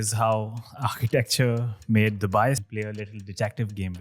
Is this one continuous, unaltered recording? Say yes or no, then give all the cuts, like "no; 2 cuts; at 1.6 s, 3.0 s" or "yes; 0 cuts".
no; 1 cut; at 2.6 s